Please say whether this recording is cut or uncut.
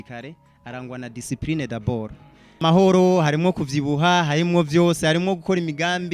cut